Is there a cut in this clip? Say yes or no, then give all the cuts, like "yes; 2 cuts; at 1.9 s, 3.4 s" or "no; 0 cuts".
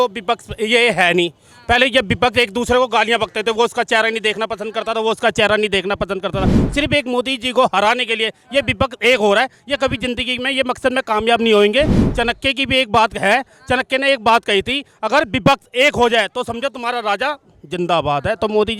no; 0 cuts